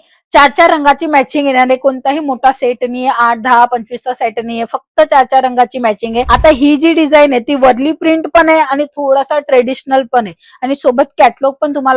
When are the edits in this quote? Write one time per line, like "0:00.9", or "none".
0:06.3